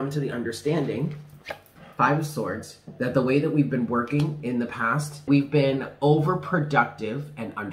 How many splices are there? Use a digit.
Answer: 1